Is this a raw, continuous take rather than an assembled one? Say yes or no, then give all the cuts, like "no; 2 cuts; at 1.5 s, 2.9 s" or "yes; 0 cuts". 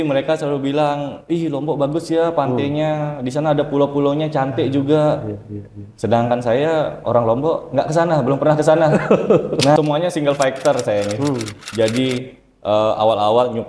no; 1 cut; at 9.8 s